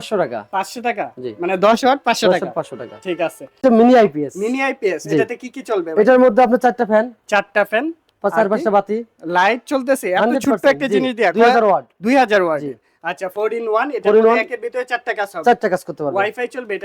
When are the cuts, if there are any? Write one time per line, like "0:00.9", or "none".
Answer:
0:03.6